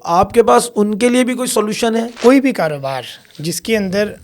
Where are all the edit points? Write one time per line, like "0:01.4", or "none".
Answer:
0:02.1